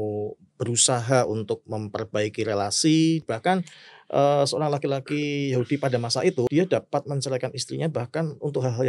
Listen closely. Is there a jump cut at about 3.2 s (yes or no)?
yes